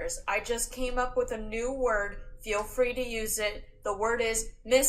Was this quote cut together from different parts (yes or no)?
no